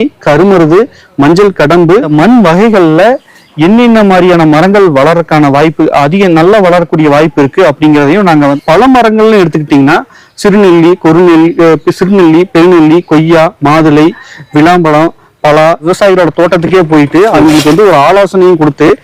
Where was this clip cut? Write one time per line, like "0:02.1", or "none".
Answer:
0:02.1
0:08.6
0:15.9